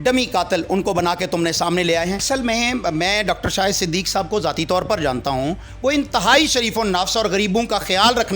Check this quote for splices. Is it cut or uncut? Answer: cut